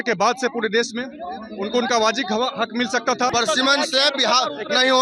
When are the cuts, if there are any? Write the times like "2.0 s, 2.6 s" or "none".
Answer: 3.3 s